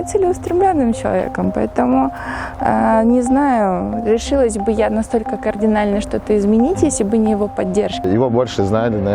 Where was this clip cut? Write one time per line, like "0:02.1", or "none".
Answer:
0:08.0